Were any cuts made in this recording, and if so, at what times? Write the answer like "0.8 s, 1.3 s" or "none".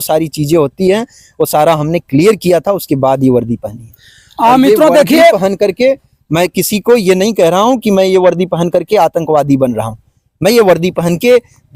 none